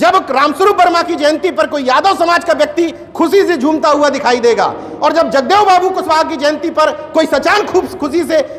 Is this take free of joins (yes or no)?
yes